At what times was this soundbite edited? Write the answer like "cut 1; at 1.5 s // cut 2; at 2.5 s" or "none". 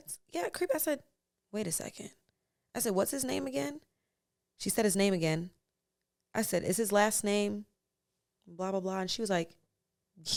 none